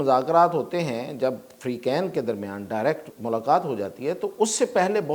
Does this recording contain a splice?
yes; 1 cut; at 3.1 s

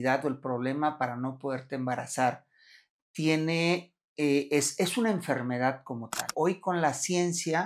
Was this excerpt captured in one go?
no; 1 cut; at 6.3 s

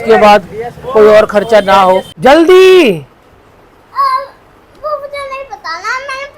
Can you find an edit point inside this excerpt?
yes; 1 cut; at 2.1 s

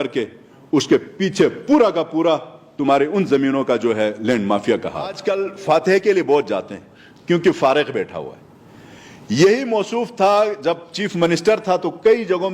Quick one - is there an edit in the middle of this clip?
yes; 1 cut; at 5.2 s

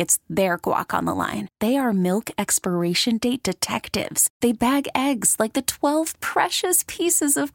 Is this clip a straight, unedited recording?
yes; 0 cuts

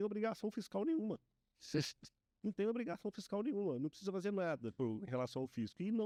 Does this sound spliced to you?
no; 0 cuts

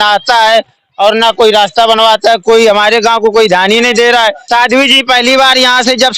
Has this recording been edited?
yes; 1 cut; at 4.4 s

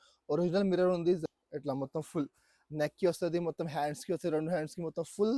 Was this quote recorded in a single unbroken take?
no; 1 cut; at 1.2 s

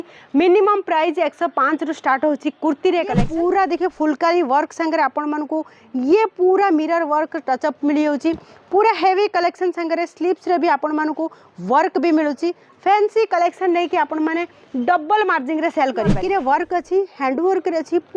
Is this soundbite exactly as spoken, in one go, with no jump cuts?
no; 2 cuts; at 3.2 s, 16.1 s

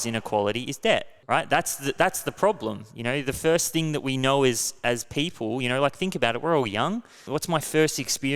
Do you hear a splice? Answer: yes; 2 cuts; at 1.1 s, 7.2 s

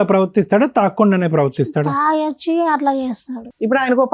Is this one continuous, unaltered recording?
yes; 0 cuts

